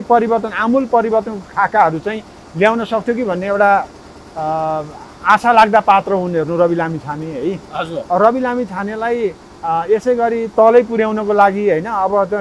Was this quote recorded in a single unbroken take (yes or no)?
yes